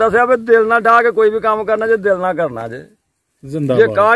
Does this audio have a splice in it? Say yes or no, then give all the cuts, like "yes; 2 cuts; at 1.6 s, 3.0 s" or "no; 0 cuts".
no; 0 cuts